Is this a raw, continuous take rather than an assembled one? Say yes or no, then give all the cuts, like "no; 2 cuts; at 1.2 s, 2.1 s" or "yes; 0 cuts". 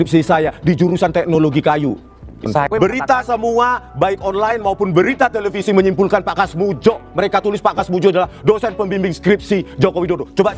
no; 1 cut; at 2.3 s